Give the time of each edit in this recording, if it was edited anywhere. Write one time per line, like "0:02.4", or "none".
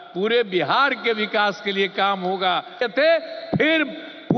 0:02.8